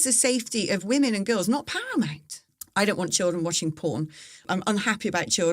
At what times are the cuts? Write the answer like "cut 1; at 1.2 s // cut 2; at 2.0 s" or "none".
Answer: cut 1; at 2.5 s // cut 2; at 4.4 s